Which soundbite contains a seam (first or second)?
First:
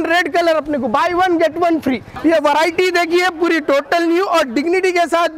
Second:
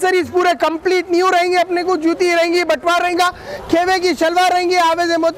first